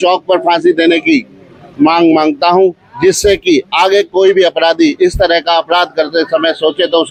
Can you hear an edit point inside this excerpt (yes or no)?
no